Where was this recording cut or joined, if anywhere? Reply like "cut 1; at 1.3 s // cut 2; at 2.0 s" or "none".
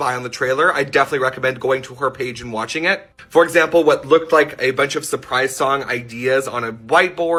none